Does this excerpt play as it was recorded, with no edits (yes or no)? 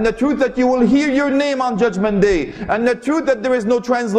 yes